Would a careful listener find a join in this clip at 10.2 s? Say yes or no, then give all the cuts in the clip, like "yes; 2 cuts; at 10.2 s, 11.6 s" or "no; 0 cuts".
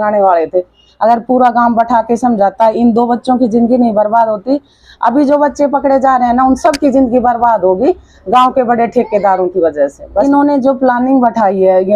yes; 1 cut; at 10.2 s